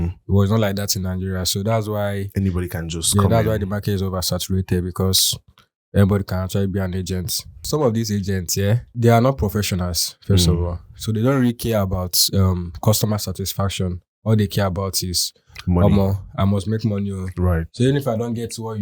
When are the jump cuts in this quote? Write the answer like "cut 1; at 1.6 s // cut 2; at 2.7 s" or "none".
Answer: cut 1; at 7.6 s // cut 2; at 8.9 s